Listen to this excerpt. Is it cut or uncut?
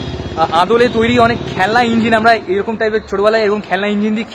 uncut